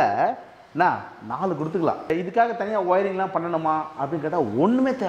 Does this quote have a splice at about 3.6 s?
no; 1 cut; at 2.1 s

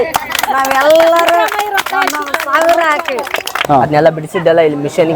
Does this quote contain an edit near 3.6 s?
yes; 1 cut; at 3.6 s

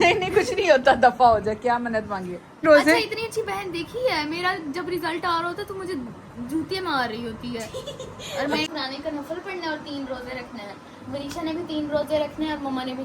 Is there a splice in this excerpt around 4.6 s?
no; 2 cuts; at 2.6 s, 8.7 s

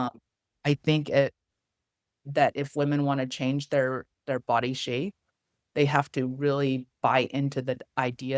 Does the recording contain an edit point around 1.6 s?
no; 0 cuts

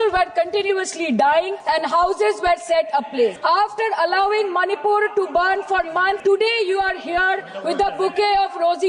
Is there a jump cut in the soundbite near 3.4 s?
yes; 3 cuts; at 1.6 s, 3.4 s, 6.2 s

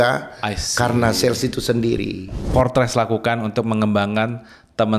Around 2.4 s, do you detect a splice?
yes; 1 cut; at 2.4 s

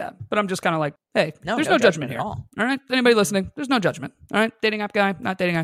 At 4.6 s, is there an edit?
no; 1 cut; at 1.0 s

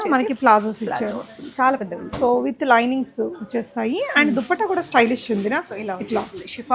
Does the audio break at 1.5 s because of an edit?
no; 0 cuts

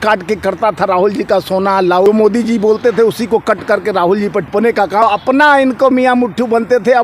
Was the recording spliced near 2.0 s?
yes; 2 cuts; at 2.0 s, 4.8 s

